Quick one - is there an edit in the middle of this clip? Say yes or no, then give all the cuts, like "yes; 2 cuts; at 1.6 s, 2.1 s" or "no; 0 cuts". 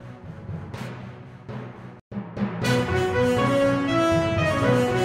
no; 0 cuts